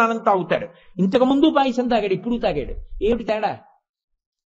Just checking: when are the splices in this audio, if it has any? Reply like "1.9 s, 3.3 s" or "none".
none